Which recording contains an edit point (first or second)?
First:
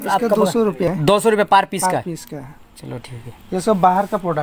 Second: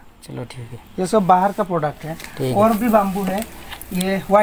first